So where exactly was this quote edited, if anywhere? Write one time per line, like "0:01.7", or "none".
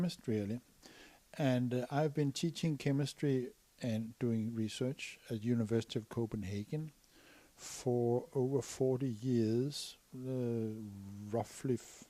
0:07.5